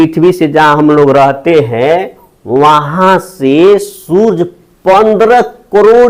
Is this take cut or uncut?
uncut